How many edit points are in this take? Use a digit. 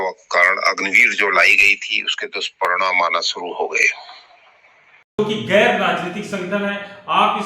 1